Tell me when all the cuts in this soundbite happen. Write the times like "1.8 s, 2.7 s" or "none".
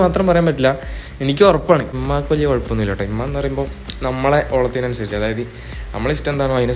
2.0 s